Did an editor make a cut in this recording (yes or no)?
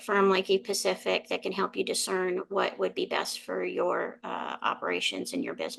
no